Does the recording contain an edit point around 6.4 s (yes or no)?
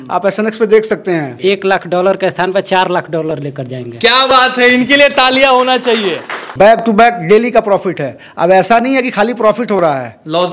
yes